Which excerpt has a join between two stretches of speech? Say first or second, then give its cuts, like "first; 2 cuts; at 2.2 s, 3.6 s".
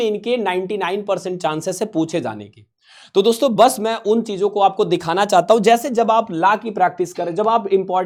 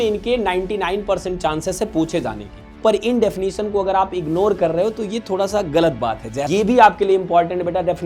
second; 2 cuts; at 2.8 s, 6.5 s